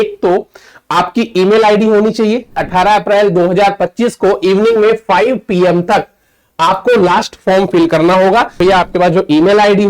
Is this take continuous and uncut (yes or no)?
no